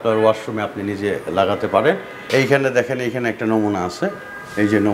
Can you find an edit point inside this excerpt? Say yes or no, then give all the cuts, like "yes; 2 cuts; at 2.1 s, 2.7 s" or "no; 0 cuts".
yes; 1 cut; at 2.1 s